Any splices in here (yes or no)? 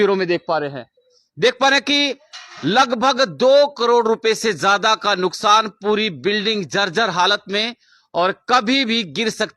no